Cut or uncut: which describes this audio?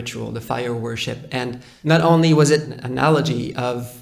cut